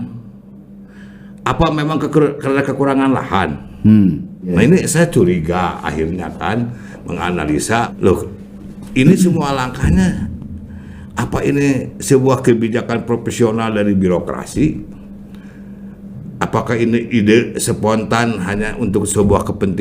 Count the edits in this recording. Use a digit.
2